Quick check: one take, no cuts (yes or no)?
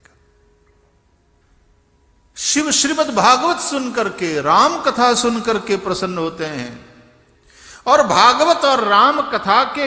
no